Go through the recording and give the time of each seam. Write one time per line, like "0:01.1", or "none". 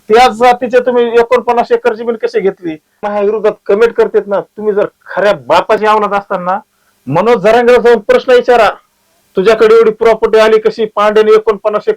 0:03.0